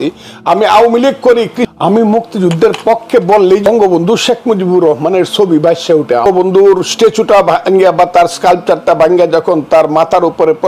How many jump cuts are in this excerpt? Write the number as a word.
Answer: three